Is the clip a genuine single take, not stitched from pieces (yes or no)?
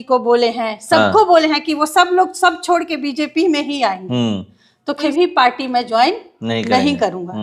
no